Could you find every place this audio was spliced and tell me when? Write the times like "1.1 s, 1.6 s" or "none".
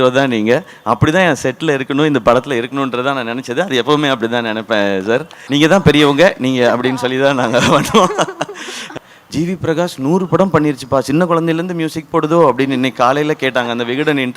5.4 s, 8.9 s